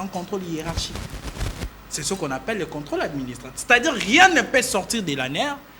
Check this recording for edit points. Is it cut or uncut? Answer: uncut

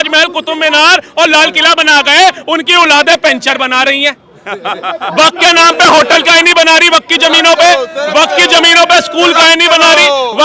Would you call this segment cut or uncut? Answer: uncut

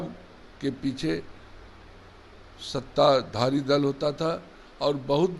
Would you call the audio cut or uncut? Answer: uncut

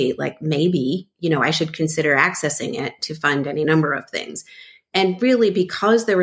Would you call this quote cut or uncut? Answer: uncut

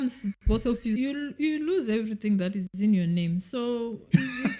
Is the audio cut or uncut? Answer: cut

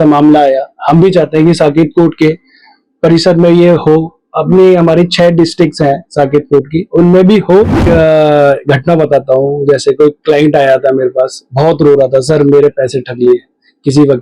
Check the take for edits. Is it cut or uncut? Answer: cut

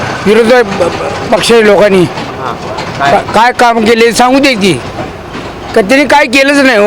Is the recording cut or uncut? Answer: uncut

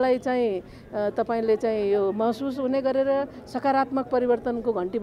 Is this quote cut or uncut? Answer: uncut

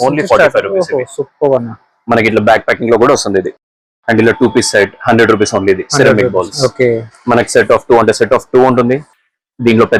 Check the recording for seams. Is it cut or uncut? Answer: uncut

